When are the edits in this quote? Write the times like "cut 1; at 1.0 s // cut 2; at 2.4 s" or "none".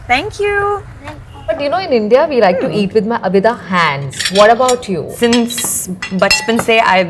cut 1; at 1.5 s // cut 2; at 5.1 s

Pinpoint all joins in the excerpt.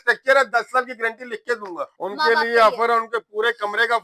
cut 1; at 1.9 s

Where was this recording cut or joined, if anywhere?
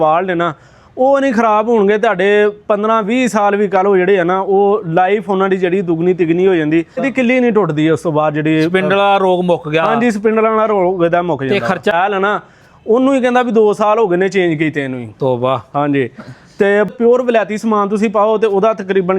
cut 1; at 7.1 s // cut 2; at 11.9 s // cut 3; at 16.9 s

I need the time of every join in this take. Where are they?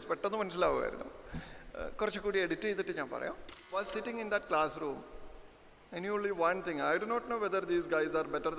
cut 1; at 3.8 s

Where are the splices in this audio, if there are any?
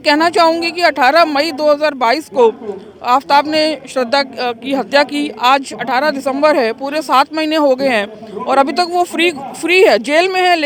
none

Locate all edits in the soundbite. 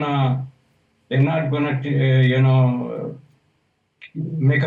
none

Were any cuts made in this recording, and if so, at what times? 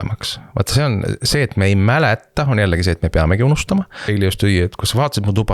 cut 1; at 4.1 s

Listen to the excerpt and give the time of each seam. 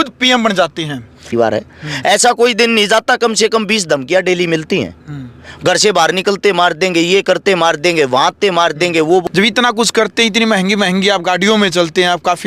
cut 1; at 1.3 s // cut 2; at 9.2 s

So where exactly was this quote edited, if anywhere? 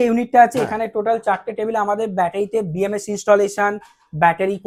none

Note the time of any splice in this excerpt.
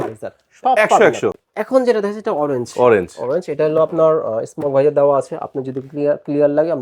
cut 1; at 1.4 s

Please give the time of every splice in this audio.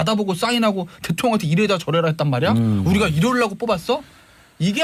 none

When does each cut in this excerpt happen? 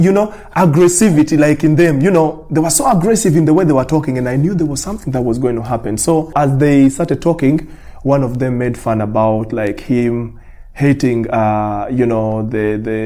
cut 1; at 6.3 s

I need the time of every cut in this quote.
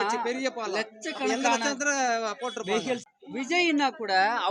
cut 1; at 3.1 s

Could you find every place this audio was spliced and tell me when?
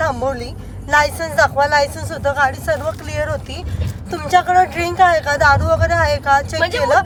none

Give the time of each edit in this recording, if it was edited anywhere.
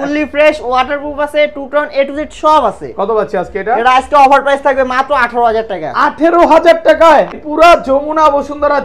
cut 1; at 7.3 s

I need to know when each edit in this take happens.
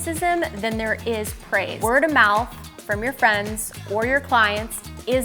cut 1; at 1.7 s

